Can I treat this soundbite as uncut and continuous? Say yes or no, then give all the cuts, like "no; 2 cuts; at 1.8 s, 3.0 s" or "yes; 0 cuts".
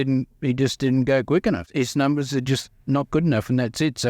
no; 1 cut; at 1.7 s